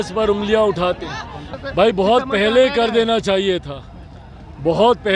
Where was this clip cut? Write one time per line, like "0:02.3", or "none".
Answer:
0:01.5